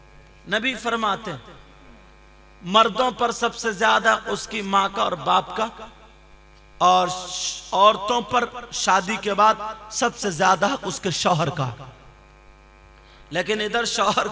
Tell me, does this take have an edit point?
no; 0 cuts

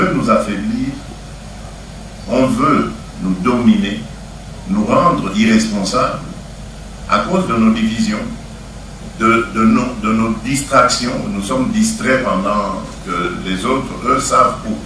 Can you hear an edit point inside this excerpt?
no; 0 cuts

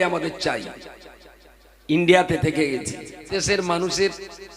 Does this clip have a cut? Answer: yes; 1 cut; at 3.4 s

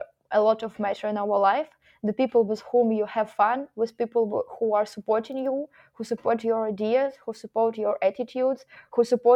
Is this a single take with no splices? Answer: yes; 0 cuts

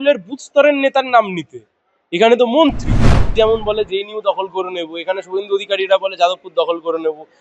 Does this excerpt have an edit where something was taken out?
yes; 1 cut; at 3.3 s

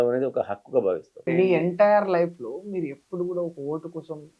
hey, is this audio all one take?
no; 1 cut; at 1.3 s

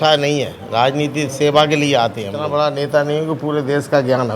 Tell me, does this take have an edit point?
yes; 1 cut; at 2.4 s

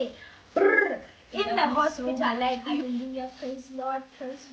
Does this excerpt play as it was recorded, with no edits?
no; 1 cut; at 2.8 s

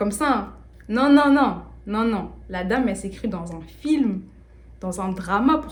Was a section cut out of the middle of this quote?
no; 0 cuts

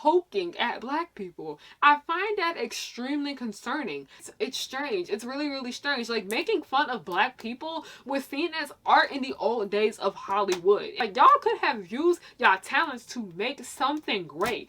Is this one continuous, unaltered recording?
no; 2 cuts; at 4.2 s, 10.9 s

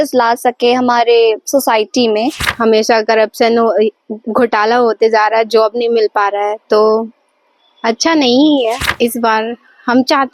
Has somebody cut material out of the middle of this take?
yes; 2 cuts; at 2.4 s, 8.8 s

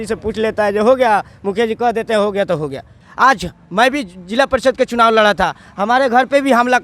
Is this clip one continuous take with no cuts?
no; 1 cut; at 2.9 s

